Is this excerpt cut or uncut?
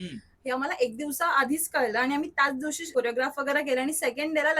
cut